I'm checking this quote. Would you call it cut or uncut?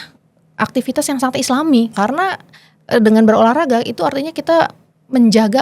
cut